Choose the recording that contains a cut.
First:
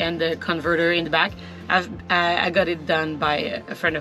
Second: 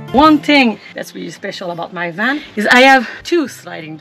second; 3 cuts; at 0.9 s, 2.5 s, 3.1 s

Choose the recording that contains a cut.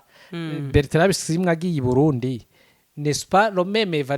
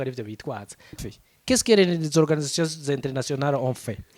second; 1 cut; at 1.1 s

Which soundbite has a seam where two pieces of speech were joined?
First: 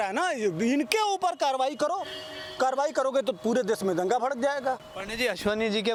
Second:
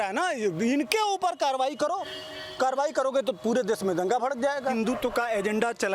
second; 1 cut; at 4.7 s

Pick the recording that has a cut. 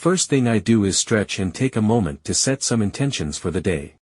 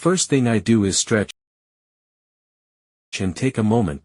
first; 1 cut; at 1.3 s

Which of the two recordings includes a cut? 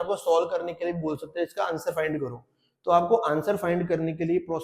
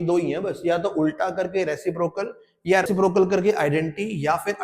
second; 1 cut; at 2.9 s

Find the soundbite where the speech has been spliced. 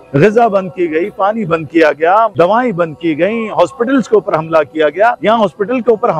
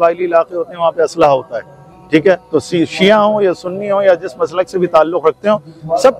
first; 2 cuts; at 2.3 s, 5.2 s

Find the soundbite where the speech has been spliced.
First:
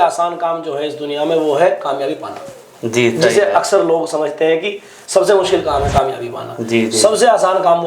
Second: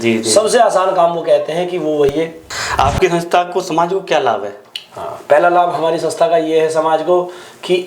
second; 1 cut; at 2.4 s

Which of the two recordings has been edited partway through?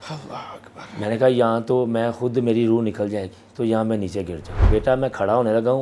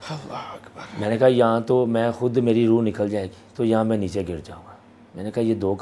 first; 1 cut; at 4.6 s

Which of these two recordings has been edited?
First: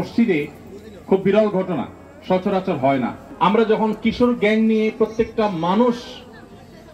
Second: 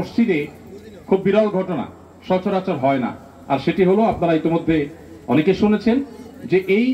first; 1 cut; at 3.2 s

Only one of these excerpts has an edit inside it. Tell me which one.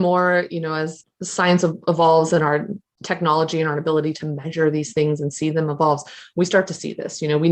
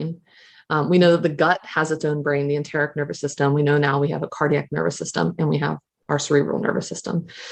first; 1 cut; at 1.0 s

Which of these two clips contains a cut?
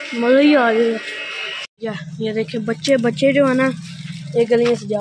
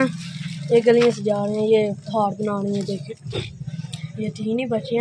first; 1 cut; at 1.7 s

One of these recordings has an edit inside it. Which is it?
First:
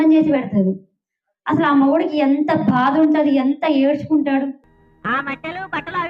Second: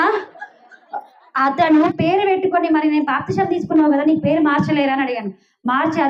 second; 1 cut; at 1.9 s

